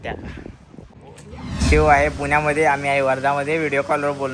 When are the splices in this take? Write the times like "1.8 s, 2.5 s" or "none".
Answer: 1.3 s